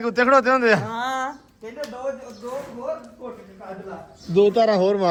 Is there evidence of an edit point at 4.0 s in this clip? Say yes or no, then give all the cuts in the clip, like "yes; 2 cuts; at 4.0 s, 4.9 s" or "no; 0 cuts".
no; 0 cuts